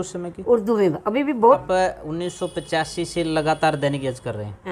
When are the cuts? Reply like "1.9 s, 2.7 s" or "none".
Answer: 1.6 s